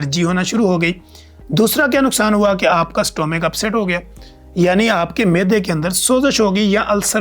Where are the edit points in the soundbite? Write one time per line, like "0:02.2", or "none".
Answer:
none